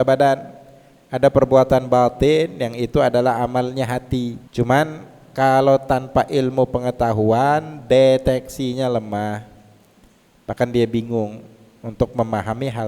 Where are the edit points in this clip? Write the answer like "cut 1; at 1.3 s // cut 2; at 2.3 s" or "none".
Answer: cut 1; at 4.4 s

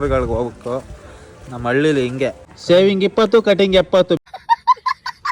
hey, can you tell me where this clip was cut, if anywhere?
cut 1; at 2.6 s // cut 2; at 4.2 s

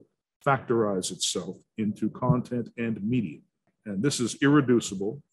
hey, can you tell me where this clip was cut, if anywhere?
cut 1; at 3.7 s

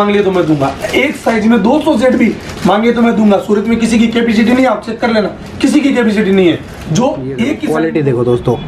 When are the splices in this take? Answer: cut 1; at 7.6 s

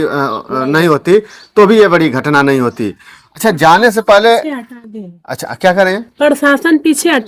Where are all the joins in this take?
none

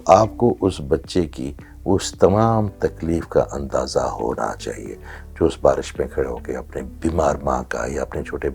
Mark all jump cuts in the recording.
cut 1; at 6.9 s

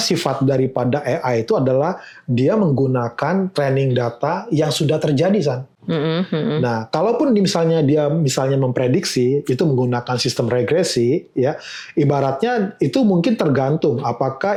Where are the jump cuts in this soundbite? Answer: none

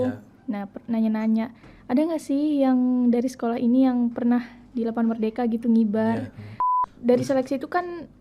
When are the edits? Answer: cut 1; at 6.8 s

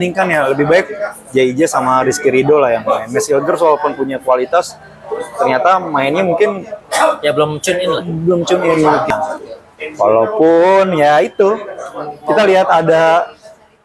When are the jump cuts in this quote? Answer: cut 1; at 9.1 s

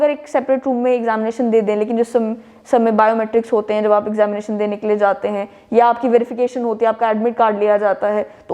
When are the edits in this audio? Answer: none

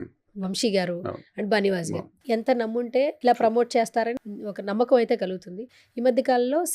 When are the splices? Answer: cut 1; at 2.1 s // cut 2; at 3.2 s // cut 3; at 4.2 s

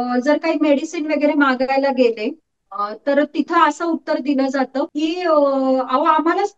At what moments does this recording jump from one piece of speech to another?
cut 1; at 4.9 s

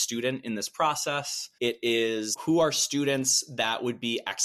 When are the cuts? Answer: none

